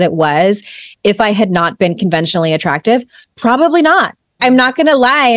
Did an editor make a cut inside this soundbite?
yes; 1 cut; at 4.4 s

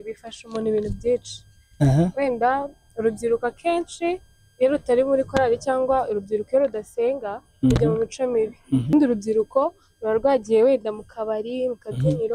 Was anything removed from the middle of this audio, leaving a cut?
yes; 1 cut; at 8.9 s

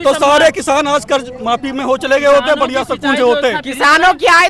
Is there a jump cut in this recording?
no; 0 cuts

